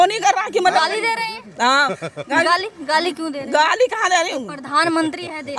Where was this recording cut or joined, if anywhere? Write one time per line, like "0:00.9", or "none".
none